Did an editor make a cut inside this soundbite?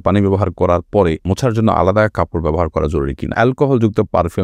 yes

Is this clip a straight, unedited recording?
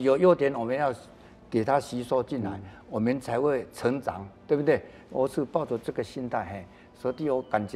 yes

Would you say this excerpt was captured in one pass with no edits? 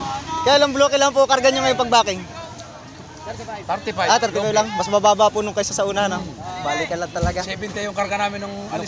yes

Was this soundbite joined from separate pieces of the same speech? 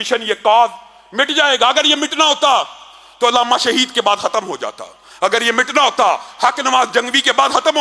no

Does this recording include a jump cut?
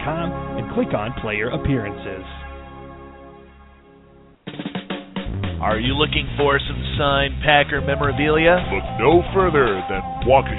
yes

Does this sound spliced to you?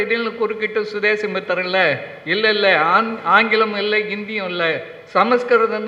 no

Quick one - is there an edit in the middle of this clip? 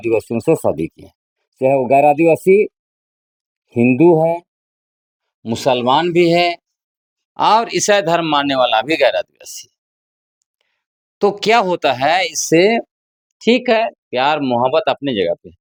no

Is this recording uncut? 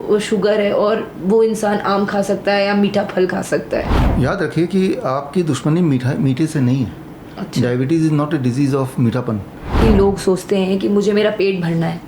no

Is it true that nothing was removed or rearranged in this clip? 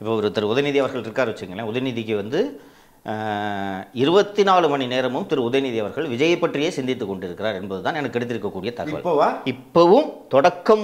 yes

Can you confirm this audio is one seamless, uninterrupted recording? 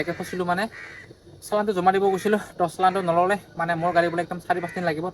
yes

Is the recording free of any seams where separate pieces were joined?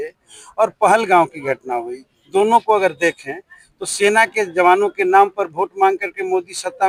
yes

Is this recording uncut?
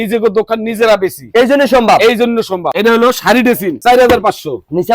no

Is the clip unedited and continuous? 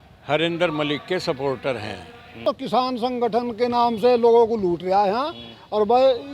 no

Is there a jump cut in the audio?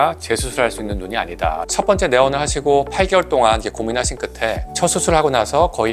yes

